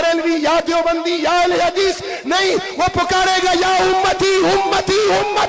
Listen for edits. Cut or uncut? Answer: uncut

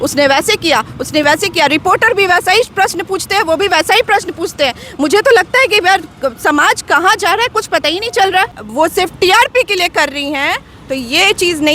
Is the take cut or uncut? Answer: cut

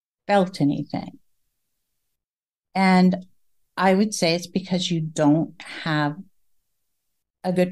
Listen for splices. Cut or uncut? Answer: uncut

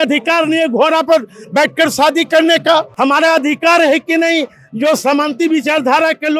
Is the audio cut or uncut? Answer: cut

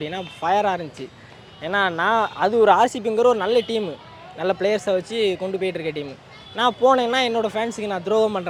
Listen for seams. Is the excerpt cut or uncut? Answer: uncut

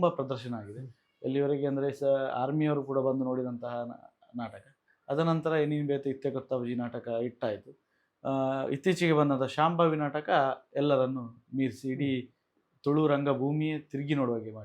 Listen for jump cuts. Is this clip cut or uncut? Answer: uncut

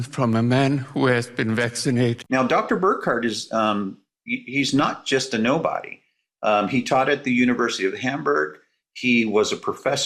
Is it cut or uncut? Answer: cut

